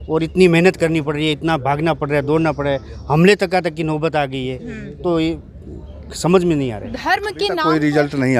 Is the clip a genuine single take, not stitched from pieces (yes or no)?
no